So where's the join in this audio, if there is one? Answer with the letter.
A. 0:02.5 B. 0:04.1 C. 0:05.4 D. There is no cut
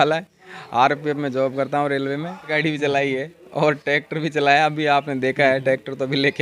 A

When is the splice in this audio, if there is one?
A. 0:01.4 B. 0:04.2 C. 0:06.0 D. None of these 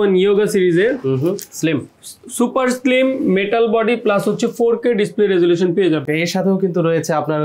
C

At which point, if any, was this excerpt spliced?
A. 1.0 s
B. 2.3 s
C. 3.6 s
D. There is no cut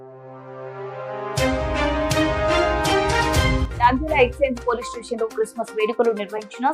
C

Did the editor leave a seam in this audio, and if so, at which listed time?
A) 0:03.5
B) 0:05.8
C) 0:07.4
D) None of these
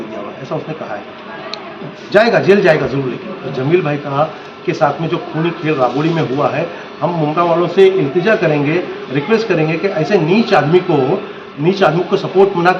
A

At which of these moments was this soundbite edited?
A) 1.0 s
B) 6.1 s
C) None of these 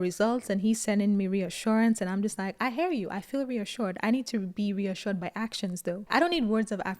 B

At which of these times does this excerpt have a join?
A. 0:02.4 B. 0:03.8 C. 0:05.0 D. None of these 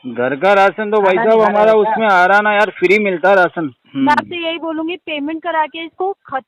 B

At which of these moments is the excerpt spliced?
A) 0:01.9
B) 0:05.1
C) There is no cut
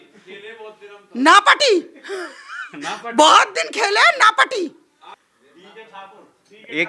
B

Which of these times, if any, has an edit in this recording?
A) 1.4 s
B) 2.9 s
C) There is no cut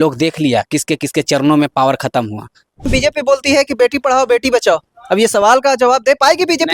B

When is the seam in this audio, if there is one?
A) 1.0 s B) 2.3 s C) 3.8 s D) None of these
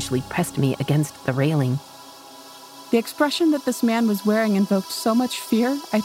B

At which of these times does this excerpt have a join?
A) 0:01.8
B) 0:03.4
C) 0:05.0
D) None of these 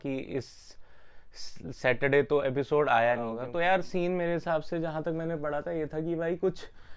B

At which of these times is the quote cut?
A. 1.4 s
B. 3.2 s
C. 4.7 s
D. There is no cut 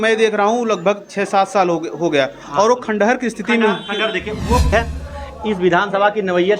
C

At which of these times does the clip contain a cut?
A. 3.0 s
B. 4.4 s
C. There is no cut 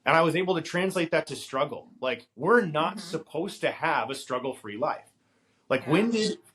C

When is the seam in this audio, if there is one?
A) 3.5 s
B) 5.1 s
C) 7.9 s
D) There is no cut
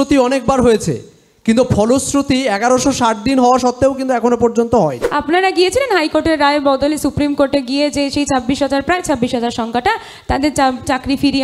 B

